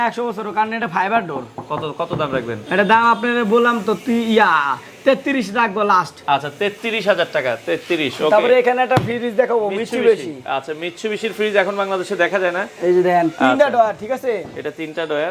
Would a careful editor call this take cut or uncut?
uncut